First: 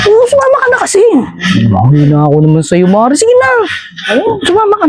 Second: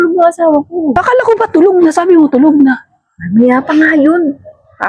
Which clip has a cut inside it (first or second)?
second